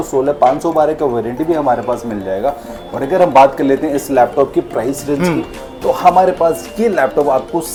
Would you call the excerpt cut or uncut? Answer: uncut